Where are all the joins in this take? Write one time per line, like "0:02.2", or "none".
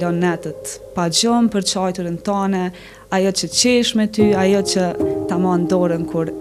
none